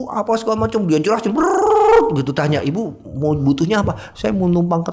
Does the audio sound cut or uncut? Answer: uncut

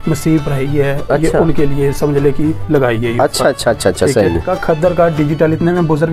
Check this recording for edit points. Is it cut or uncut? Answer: cut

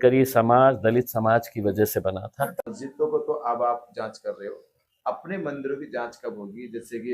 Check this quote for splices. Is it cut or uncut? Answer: cut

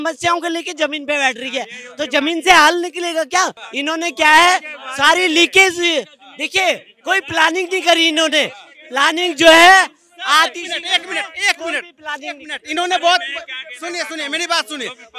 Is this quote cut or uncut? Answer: uncut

